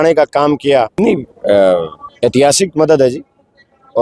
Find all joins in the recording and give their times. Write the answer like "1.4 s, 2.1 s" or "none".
0.9 s